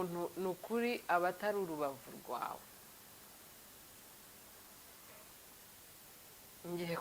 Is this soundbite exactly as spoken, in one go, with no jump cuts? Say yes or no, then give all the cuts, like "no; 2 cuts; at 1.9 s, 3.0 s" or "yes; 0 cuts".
yes; 0 cuts